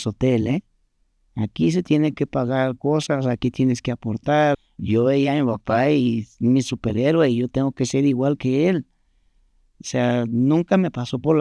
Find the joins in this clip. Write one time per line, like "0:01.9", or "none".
0:04.6